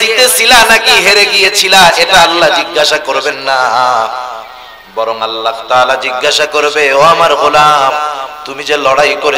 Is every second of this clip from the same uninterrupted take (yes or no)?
yes